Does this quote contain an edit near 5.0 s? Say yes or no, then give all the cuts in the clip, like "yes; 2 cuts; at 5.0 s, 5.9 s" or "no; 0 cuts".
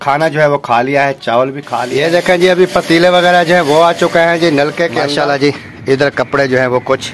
yes; 2 cuts; at 1.9 s, 5.0 s